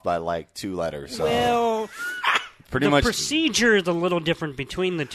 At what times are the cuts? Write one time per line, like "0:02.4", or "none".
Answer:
none